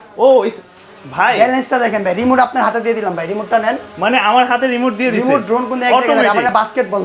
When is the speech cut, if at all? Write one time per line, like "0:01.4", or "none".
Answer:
none